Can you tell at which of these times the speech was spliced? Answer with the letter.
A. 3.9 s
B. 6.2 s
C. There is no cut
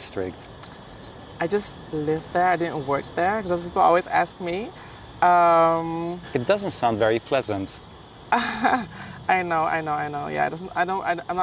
B